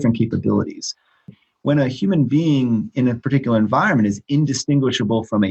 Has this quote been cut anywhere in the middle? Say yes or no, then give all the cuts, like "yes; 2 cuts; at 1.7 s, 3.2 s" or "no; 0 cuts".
yes; 1 cut; at 1.4 s